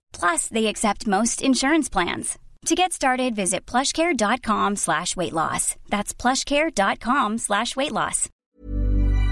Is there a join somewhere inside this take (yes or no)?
yes